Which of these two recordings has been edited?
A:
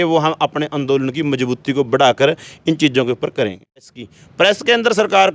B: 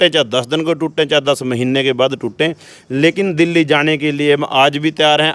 A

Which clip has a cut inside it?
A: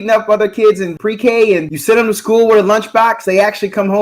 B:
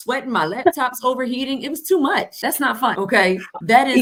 A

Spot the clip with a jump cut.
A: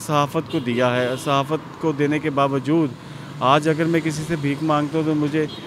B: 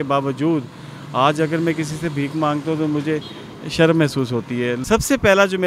B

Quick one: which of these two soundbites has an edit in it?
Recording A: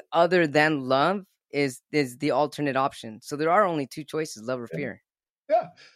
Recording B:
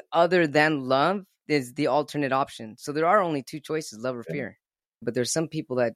B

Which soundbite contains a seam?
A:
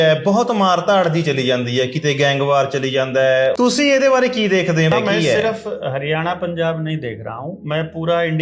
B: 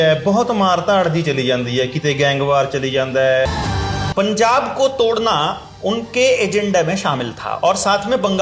B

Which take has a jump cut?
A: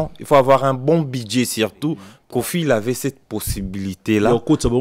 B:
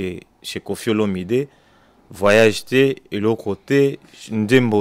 A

